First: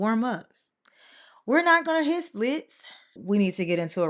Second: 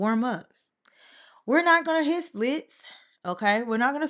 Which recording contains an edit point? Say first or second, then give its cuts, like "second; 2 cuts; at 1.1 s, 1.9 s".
first; 1 cut; at 3.1 s